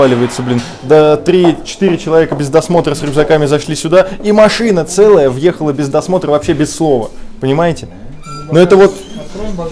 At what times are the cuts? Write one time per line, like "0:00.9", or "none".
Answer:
none

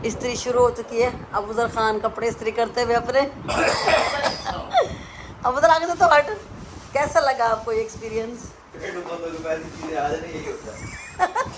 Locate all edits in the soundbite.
none

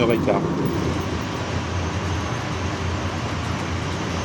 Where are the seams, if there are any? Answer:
none

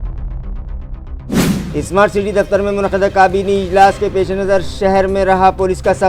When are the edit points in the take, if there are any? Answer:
0:01.4

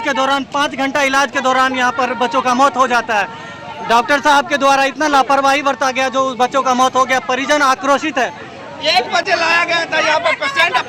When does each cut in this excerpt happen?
none

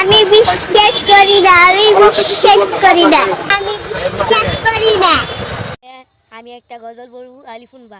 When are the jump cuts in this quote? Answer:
0:05.9

